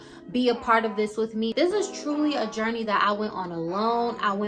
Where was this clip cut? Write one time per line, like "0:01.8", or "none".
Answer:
0:01.5